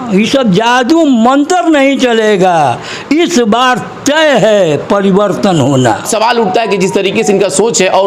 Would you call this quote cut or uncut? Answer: uncut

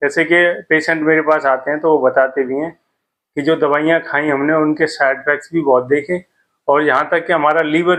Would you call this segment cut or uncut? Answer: uncut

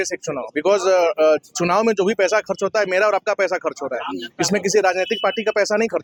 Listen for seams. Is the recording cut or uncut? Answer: uncut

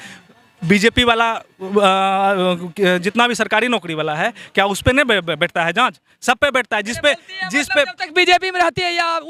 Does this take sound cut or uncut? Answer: uncut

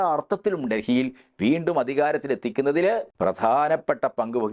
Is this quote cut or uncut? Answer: cut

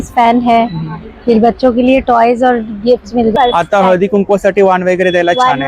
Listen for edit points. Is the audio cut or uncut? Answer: cut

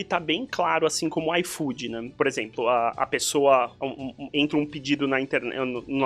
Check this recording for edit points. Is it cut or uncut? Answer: cut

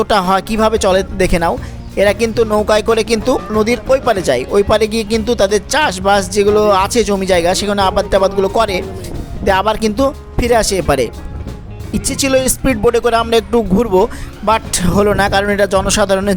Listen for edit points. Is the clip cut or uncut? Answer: cut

